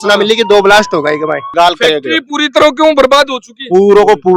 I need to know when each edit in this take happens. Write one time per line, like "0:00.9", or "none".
0:01.5

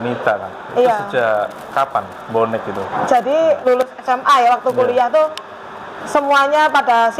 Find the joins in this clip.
0:03.6

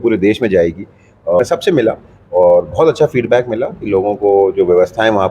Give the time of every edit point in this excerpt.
0:01.4

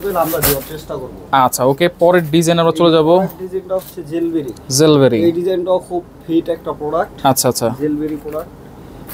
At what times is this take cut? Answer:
none

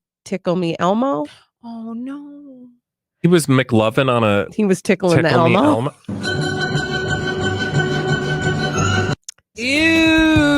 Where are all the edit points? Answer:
0:09.7

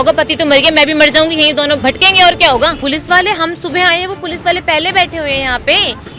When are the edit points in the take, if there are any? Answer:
0:01.8
0:02.8

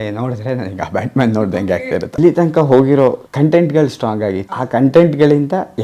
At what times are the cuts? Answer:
0:02.2
0:03.2
0:04.5

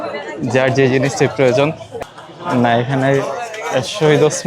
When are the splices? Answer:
0:01.9

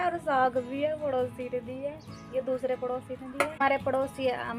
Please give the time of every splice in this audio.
0:03.6

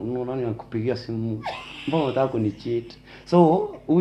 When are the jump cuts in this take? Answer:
none

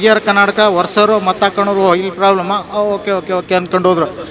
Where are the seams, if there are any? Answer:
none

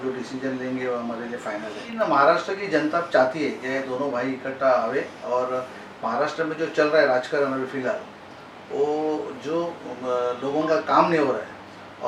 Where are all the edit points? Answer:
0:02.0

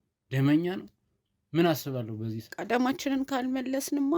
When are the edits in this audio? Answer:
0:02.5

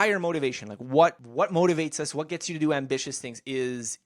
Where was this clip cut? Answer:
0:01.2

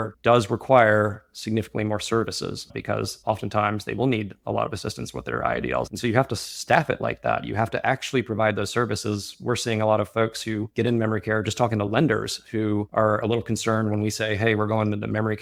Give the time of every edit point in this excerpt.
none

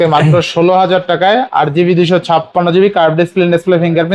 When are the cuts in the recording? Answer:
none

